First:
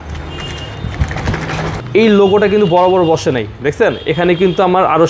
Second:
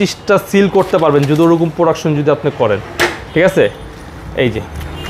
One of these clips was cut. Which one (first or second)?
first